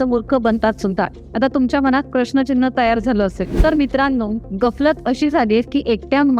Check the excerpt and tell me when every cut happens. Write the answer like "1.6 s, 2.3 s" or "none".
none